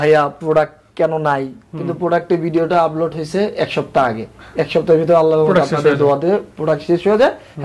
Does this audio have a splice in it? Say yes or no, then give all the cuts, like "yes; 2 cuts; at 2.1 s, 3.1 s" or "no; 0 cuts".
no; 0 cuts